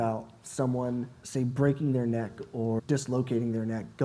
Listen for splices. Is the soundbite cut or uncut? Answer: cut